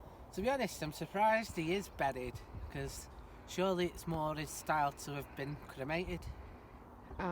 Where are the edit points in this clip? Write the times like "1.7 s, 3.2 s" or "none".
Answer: none